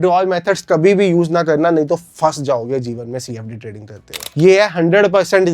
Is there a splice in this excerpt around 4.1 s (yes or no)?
yes